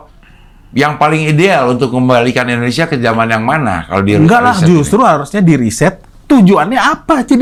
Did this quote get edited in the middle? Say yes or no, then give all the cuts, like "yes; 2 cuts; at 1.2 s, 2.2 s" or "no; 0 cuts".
no; 0 cuts